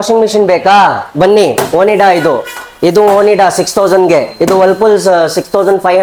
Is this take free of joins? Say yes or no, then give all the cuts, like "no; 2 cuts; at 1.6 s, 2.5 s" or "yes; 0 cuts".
yes; 0 cuts